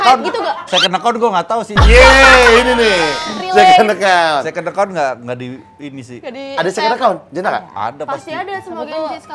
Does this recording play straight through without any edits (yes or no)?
yes